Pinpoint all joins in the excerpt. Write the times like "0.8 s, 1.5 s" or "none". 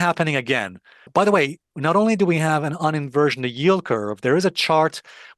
1.1 s